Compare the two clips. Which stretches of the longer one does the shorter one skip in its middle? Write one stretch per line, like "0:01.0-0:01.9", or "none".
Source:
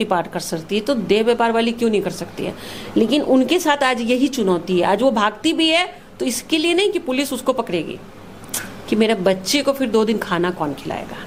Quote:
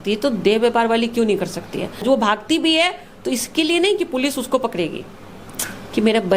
0:02.7-0:05.0